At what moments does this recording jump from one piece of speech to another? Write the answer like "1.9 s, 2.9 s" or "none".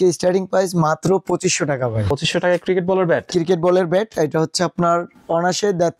2.0 s